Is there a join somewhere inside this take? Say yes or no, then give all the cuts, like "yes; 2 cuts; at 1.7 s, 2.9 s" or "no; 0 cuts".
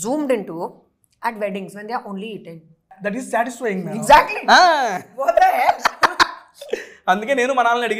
yes; 1 cut; at 3.0 s